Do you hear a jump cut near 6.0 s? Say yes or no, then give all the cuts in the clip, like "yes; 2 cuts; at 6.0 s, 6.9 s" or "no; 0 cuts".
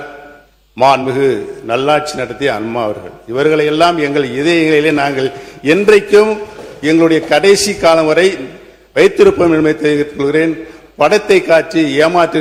no; 0 cuts